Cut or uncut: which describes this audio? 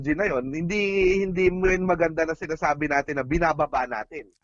uncut